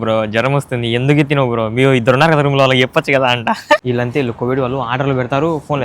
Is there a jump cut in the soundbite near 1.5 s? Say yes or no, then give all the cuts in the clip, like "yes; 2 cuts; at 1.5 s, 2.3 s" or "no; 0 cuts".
no; 1 cut; at 3.8 s